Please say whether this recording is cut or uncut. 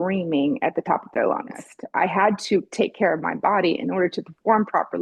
cut